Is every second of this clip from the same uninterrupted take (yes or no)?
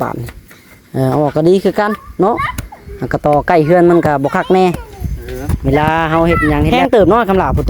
no